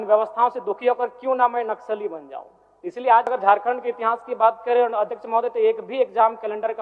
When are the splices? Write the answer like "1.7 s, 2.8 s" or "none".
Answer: 3.3 s